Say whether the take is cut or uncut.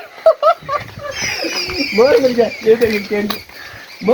uncut